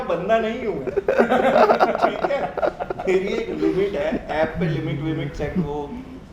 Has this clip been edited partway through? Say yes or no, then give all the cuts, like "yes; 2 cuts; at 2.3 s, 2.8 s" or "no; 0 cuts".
no; 0 cuts